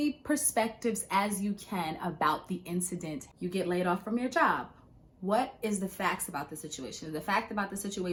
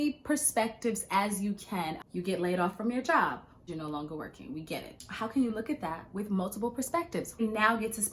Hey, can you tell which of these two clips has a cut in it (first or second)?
second